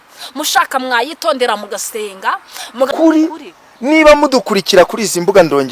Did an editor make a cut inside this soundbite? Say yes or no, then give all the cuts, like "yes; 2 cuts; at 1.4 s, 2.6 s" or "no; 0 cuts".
yes; 1 cut; at 2.9 s